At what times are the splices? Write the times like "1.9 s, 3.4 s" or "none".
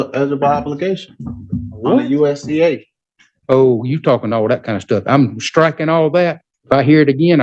6.5 s